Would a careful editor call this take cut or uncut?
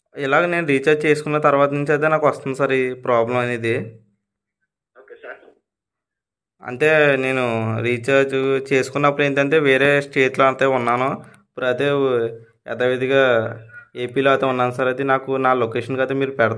uncut